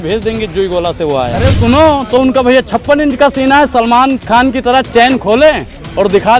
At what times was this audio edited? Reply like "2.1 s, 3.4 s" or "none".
1.6 s